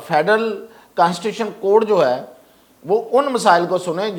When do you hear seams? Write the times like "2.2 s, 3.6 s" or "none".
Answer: none